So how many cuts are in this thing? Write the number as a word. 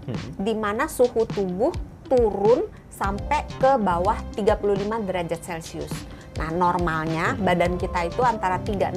zero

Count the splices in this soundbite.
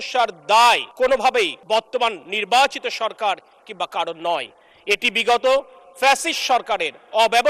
one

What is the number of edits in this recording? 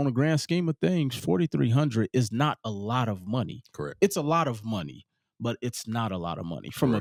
zero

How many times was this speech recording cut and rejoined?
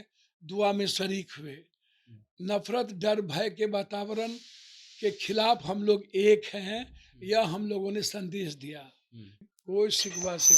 one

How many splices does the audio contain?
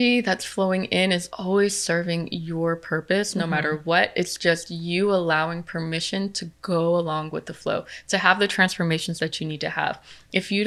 zero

